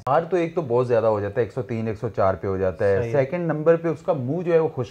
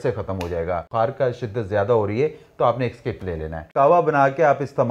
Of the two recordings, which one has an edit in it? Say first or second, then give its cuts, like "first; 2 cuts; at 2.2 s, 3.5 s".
second; 2 cuts; at 0.9 s, 3.7 s